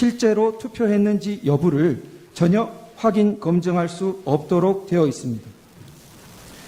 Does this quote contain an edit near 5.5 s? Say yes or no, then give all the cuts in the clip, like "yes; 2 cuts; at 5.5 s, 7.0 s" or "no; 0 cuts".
no; 0 cuts